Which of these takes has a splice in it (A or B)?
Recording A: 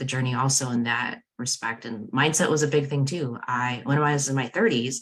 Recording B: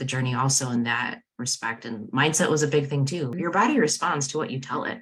B